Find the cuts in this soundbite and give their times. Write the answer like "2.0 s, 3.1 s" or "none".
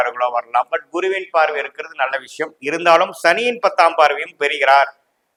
none